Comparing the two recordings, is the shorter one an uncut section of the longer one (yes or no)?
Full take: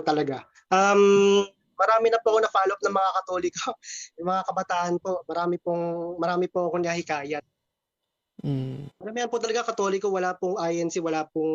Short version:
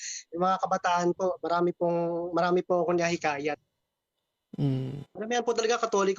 yes